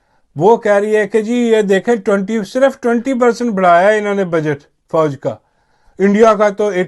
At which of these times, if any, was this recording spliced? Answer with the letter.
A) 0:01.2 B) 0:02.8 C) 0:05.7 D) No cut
D